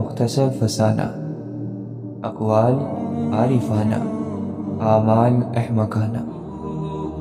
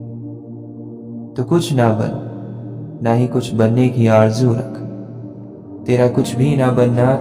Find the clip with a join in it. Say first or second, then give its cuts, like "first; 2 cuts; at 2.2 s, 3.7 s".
second; 1 cut; at 1.3 s